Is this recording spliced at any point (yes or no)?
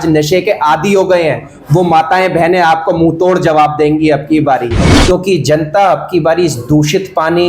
yes